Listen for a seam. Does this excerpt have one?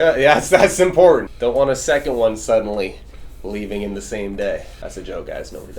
yes; 2 cuts; at 1.3 s, 4.7 s

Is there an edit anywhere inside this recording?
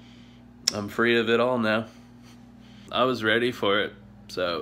yes; 1 cut; at 2.8 s

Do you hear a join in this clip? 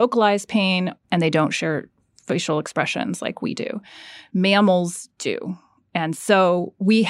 no; 0 cuts

